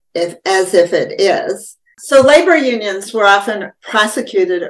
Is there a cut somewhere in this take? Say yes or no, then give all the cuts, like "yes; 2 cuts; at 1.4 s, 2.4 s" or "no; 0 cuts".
yes; 1 cut; at 1.9 s